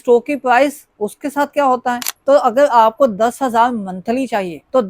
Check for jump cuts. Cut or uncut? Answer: cut